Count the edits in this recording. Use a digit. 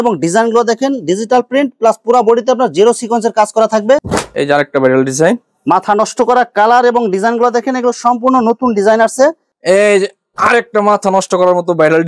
2